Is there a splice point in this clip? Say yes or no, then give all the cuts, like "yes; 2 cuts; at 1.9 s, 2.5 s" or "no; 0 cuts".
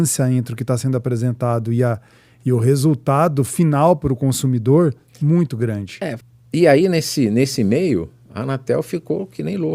yes; 1 cut; at 6.3 s